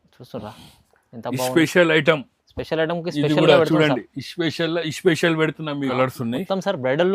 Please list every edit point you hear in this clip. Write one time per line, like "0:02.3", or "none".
0:05.9